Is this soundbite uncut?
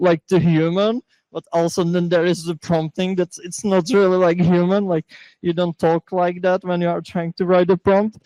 yes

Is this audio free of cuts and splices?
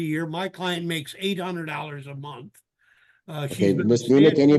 yes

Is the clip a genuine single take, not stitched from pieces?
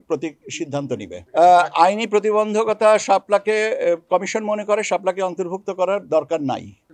yes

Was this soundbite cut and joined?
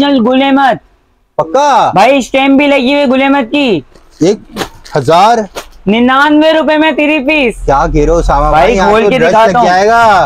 no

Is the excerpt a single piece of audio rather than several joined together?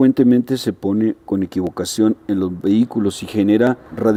yes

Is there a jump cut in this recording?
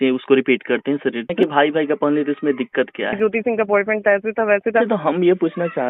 yes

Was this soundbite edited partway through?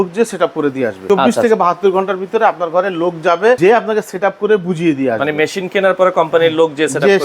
yes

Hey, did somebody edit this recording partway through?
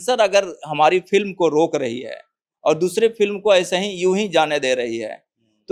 no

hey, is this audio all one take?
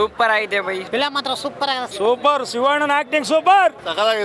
no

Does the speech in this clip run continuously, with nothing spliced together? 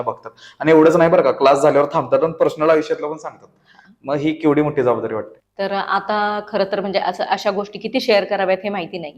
yes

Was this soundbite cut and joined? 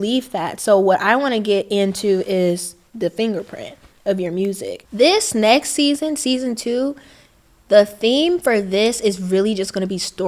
yes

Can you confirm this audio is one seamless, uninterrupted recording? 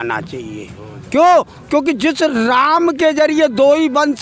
yes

